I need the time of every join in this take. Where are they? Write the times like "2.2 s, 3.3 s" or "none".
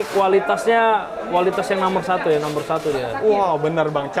none